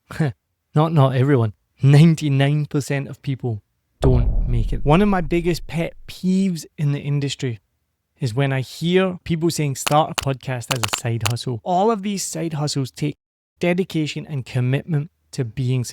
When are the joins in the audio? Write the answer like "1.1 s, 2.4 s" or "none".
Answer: 4.7 s, 9.2 s, 11.6 s